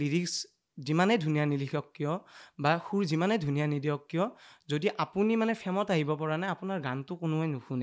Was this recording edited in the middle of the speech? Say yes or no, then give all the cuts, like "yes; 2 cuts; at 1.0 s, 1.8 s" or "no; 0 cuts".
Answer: no; 0 cuts